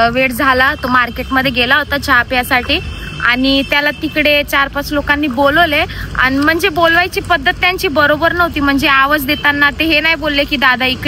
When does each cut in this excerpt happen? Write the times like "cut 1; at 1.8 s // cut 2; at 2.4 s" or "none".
none